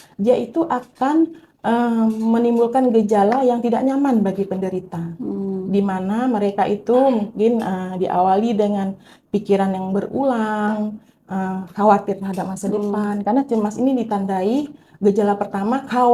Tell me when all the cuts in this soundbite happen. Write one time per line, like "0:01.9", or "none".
none